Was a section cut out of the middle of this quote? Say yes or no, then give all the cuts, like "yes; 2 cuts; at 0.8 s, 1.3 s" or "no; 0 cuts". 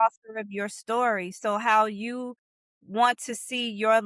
no; 0 cuts